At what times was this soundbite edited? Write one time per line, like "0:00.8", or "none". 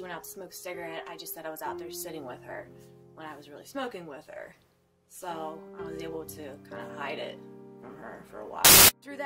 0:02.7